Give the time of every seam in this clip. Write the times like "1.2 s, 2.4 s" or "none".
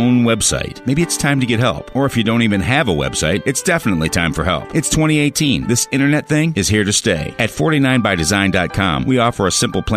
none